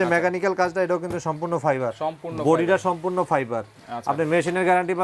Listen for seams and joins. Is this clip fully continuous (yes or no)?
yes